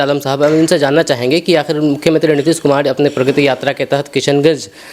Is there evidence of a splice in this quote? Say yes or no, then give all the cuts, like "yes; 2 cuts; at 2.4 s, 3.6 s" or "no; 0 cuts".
no; 0 cuts